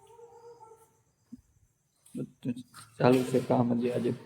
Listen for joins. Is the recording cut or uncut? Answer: uncut